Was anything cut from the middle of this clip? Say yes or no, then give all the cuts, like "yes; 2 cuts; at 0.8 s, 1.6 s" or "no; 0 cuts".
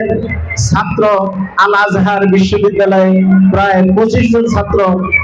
no; 0 cuts